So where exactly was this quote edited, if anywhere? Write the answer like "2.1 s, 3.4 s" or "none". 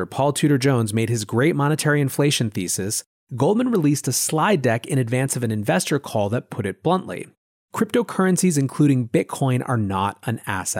none